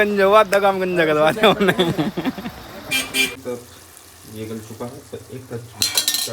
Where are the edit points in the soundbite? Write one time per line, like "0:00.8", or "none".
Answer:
0:03.4

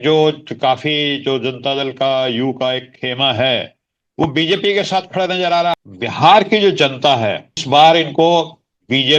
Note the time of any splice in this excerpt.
0:05.7
0:07.5

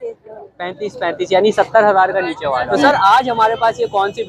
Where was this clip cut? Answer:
0:02.8

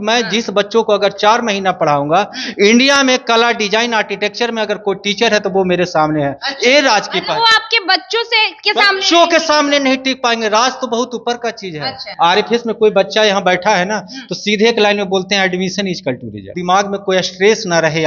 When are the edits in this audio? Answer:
0:12.0
0:16.5

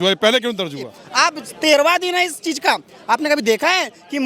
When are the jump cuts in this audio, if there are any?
0:01.0

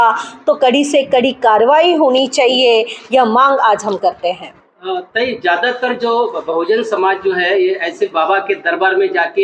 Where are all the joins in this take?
none

